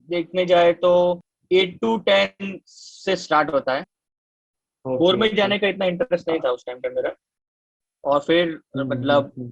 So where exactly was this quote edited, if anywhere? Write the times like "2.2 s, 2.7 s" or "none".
4.2 s, 7.4 s